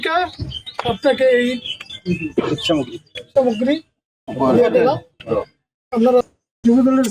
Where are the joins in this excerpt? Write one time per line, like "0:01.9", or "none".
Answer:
0:06.2